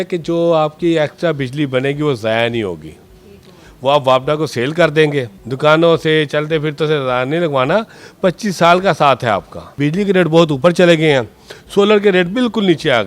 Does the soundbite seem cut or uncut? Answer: cut